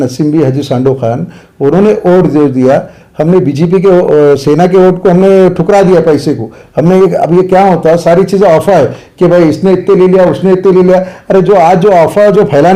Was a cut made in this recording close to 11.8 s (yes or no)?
no